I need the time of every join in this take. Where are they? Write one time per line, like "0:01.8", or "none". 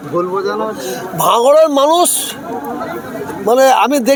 none

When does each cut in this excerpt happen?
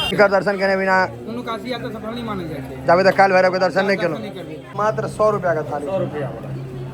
0:04.7

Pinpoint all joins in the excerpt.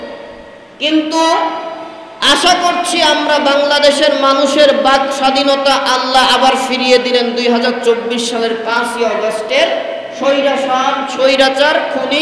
none

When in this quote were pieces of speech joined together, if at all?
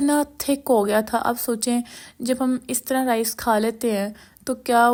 none

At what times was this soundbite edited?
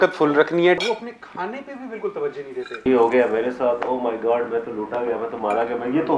0:00.8
0:02.8

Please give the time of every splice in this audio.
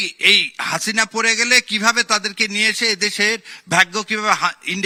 none

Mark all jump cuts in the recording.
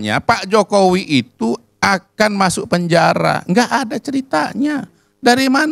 none

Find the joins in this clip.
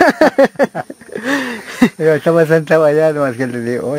none

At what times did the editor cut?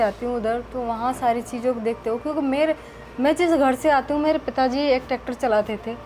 none

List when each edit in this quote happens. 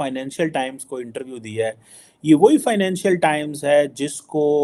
none

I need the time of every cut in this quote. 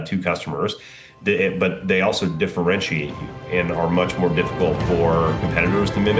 none

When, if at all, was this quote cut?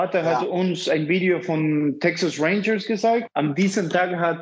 0:03.3

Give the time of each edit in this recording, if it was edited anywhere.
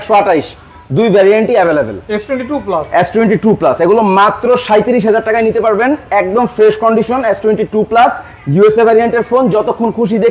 none

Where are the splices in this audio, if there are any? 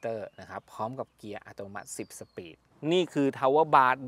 0:02.7

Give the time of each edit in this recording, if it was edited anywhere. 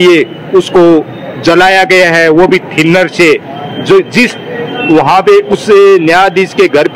none

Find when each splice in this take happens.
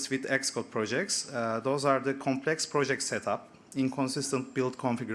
none

